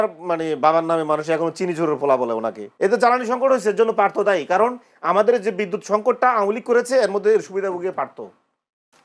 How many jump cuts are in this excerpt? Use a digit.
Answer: 1